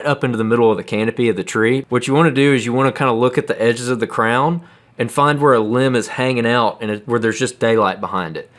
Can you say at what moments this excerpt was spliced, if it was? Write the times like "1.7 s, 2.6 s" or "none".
1.8 s